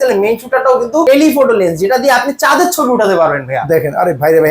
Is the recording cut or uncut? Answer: cut